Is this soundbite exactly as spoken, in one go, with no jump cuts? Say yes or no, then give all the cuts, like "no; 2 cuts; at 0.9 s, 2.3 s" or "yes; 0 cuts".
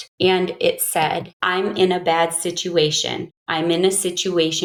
yes; 0 cuts